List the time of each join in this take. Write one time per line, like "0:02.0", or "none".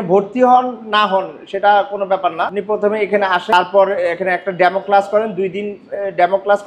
0:02.6
0:03.5